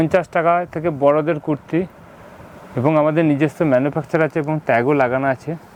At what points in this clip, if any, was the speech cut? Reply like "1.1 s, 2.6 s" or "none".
none